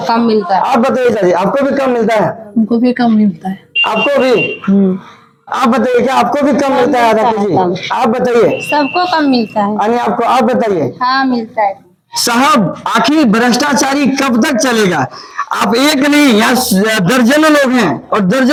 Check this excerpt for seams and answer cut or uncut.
uncut